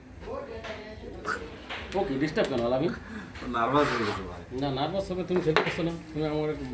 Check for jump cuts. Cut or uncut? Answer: uncut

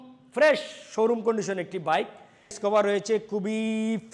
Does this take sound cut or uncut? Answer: cut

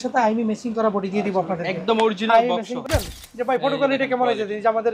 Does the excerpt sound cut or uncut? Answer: cut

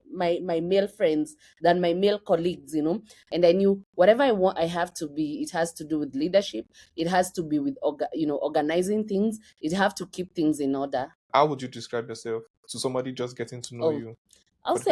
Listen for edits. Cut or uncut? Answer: cut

